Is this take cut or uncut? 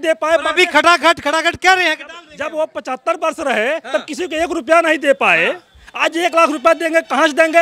uncut